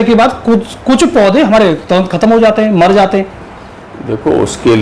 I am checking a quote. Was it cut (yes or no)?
no